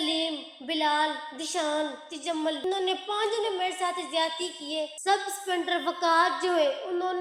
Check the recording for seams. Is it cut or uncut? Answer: cut